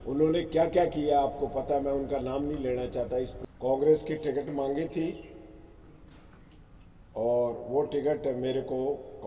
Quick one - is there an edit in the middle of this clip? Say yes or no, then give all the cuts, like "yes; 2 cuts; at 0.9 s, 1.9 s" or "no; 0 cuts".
yes; 1 cut; at 3.4 s